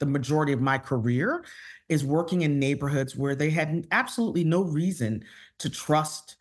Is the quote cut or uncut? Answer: uncut